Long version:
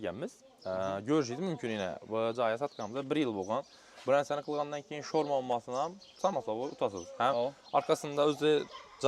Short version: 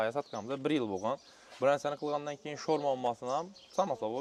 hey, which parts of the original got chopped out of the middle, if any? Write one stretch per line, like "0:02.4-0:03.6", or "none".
none